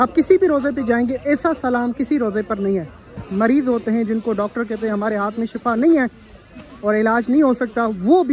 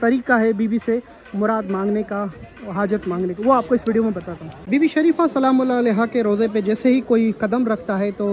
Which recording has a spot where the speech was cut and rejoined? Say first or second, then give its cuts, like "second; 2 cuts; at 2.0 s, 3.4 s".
first; 1 cut; at 3.2 s